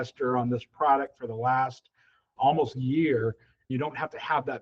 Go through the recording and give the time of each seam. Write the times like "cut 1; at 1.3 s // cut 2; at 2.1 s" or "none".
cut 1; at 2.3 s // cut 2; at 3.7 s